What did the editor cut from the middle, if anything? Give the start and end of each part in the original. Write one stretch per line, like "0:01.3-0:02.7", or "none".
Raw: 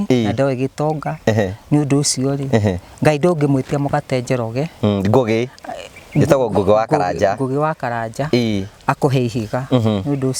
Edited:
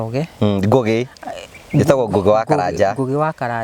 none